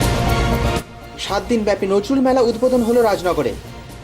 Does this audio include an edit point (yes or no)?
yes